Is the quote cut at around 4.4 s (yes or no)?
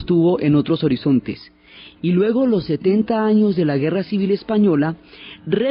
no